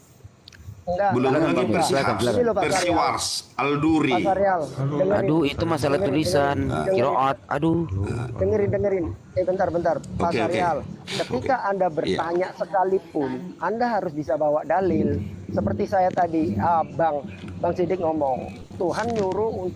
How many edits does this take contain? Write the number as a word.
zero